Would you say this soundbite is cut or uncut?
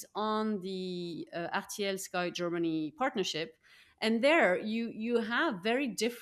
uncut